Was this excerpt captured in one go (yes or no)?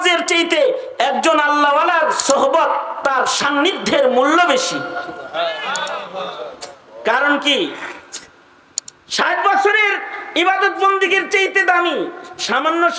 yes